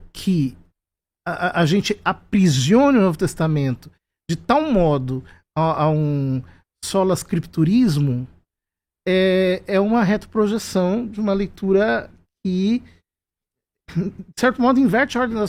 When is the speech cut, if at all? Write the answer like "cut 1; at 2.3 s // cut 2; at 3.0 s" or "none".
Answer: none